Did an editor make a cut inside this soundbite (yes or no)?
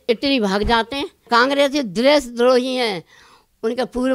yes